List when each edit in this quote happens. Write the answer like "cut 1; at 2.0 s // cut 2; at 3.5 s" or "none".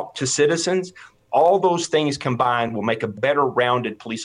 cut 1; at 3.1 s